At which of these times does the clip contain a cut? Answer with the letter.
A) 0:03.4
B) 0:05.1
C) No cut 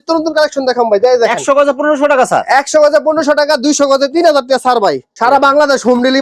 B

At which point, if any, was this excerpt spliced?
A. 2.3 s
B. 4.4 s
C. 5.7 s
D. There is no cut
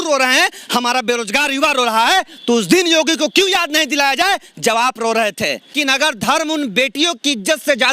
C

